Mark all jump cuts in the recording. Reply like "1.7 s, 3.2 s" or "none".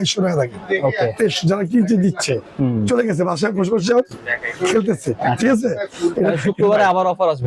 none